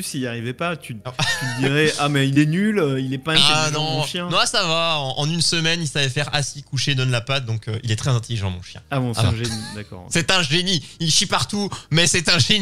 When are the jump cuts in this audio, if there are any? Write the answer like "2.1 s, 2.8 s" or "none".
none